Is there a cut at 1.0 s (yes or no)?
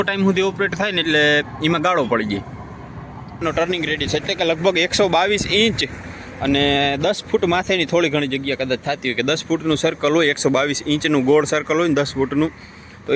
no